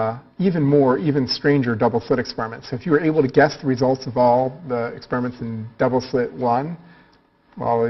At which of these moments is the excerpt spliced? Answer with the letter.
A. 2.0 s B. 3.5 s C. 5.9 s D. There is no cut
D